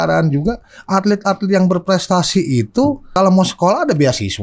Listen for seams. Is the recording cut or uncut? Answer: cut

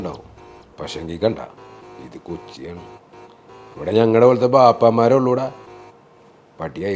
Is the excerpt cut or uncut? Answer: uncut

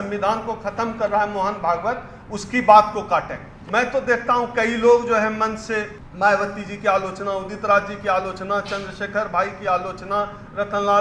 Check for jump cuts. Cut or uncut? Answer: cut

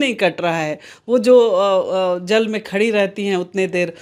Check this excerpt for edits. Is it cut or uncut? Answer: uncut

